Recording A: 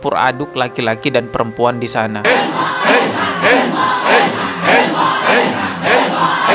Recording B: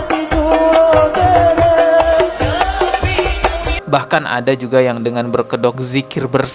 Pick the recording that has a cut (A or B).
B